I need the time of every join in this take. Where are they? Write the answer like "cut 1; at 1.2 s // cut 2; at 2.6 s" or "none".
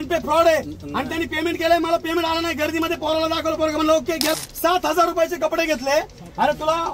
cut 1; at 4.4 s